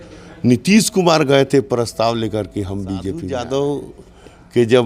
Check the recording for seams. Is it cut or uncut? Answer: cut